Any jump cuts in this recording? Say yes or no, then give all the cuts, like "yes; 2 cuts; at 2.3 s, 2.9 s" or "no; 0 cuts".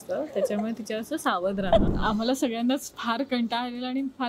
yes; 2 cuts; at 1.9 s, 2.9 s